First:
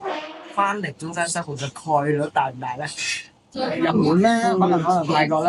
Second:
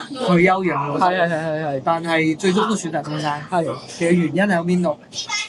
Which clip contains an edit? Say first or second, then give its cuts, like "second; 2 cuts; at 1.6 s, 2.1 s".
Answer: first; 1 cut; at 3.4 s